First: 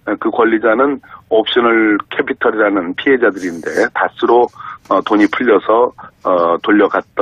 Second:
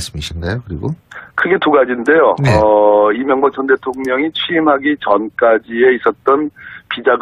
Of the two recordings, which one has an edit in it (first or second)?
second